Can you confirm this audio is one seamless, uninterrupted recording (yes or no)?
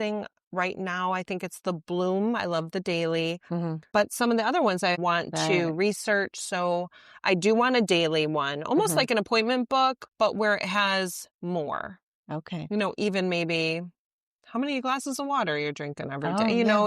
no